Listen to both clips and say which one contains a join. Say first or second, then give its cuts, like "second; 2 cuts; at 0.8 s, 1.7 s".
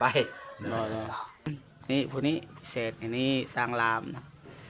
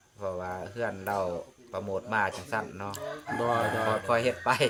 first; 1 cut; at 1.6 s